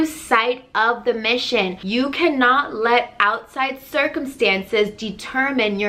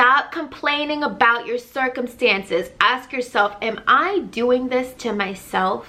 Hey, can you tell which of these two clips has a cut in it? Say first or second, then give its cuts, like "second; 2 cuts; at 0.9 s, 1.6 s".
first; 1 cut; at 1.8 s